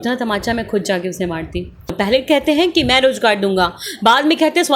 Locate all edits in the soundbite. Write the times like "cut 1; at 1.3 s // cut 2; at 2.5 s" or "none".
cut 1; at 1.9 s